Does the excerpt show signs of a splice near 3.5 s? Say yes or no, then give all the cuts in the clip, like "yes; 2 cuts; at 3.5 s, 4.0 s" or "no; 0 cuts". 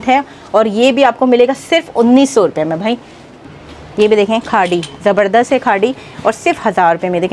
yes; 1 cut; at 3.5 s